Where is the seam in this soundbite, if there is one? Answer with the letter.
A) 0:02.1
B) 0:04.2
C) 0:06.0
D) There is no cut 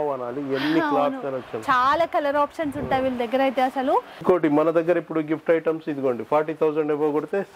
B